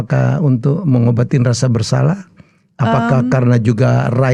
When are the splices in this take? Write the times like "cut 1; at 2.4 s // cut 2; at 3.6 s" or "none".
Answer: none